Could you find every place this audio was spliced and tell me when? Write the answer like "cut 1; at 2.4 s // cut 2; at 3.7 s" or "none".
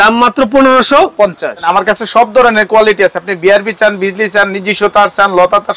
cut 1; at 1.6 s